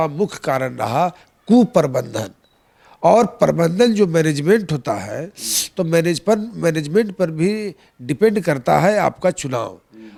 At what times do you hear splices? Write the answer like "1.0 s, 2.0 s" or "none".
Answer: none